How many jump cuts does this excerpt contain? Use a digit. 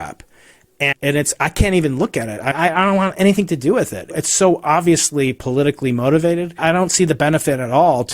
4